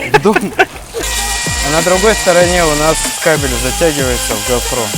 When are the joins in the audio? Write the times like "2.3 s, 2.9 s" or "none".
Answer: 1.0 s